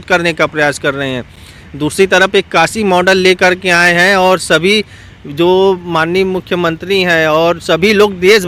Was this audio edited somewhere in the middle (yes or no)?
no